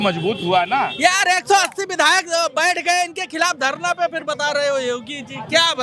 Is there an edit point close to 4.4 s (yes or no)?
no